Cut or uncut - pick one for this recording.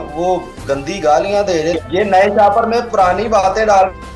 cut